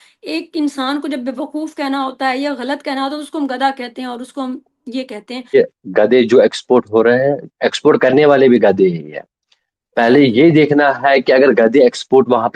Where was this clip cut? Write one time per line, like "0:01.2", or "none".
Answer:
0:05.4

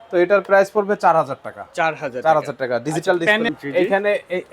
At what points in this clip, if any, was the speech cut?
0:03.5

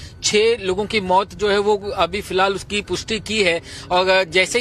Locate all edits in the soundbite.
none

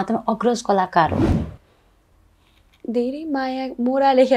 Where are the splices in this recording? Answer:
0:01.3

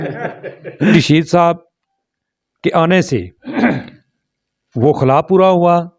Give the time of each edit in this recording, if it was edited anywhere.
0:00.9

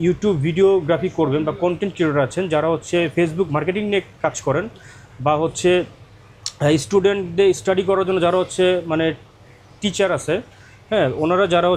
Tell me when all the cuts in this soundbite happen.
none

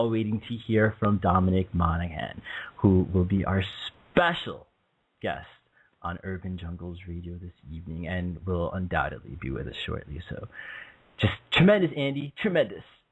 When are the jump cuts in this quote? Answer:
0:07.0

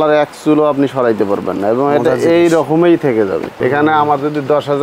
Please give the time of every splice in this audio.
0:03.5

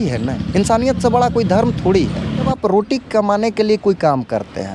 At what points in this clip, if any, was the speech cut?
0:02.5

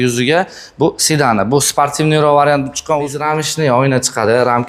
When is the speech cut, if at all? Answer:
0:03.2

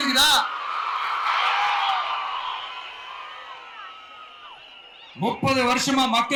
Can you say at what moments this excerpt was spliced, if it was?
none

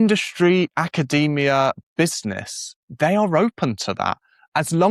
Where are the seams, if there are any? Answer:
none

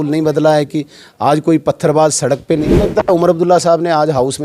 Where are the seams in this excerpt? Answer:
0:02.9

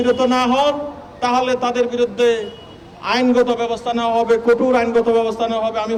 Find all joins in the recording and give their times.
none

